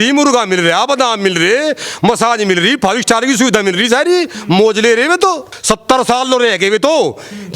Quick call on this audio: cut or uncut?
cut